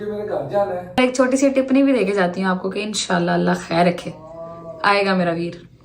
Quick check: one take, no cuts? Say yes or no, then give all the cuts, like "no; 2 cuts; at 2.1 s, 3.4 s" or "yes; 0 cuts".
no; 1 cut; at 1.0 s